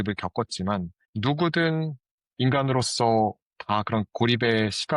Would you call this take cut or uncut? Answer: cut